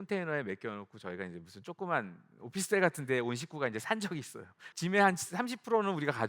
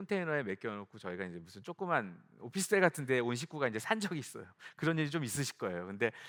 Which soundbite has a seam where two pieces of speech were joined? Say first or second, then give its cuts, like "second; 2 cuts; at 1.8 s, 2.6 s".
first; 1 cut; at 4.6 s